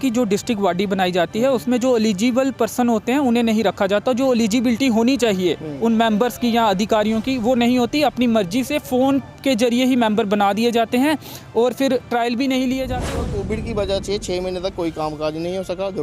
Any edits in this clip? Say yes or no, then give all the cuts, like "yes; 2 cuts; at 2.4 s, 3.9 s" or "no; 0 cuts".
yes; 1 cut; at 13.1 s